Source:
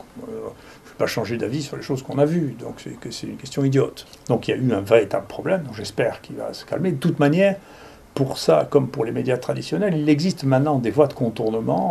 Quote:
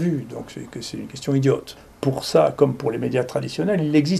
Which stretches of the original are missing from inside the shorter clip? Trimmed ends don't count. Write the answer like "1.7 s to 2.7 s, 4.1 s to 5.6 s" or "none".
4.1 s to 7.9 s

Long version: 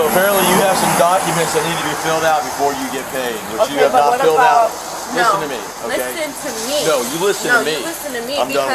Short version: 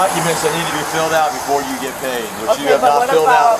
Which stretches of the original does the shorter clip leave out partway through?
none

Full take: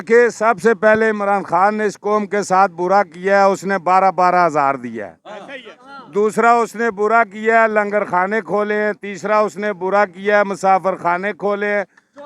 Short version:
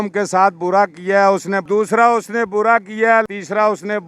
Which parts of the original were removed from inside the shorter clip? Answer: 3.8 s to 6.1 s, 7.7 s to 9.0 s

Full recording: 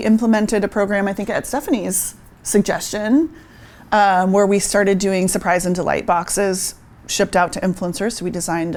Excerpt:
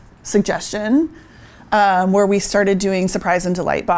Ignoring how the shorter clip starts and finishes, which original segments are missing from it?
none

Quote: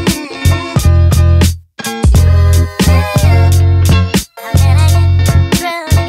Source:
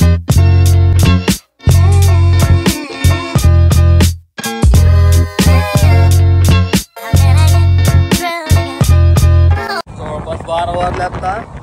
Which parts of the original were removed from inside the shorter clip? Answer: none

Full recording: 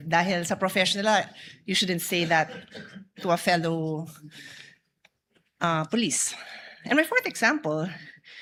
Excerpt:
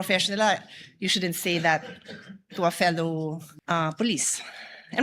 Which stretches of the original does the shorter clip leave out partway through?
4.2 s to 5.4 s

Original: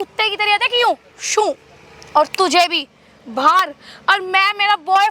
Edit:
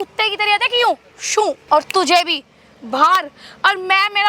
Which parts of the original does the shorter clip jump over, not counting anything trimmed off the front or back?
1.6 s to 2.0 s

